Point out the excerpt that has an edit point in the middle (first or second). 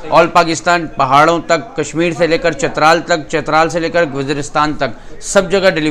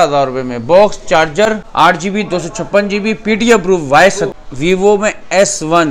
second